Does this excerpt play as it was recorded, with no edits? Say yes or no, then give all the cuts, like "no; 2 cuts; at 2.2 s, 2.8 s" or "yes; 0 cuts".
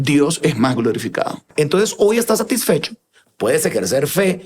no; 1 cut; at 1.5 s